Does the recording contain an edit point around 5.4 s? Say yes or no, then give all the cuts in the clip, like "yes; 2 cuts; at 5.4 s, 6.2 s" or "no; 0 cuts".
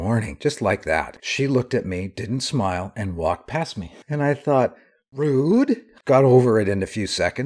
no; 2 cuts; at 1.2 s, 4.0 s